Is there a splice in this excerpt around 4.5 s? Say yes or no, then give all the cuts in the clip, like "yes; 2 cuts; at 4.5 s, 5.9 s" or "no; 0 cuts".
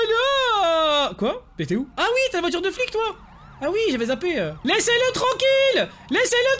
yes; 1 cut; at 4.5 s